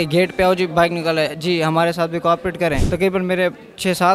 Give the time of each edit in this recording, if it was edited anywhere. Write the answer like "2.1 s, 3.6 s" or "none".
2.8 s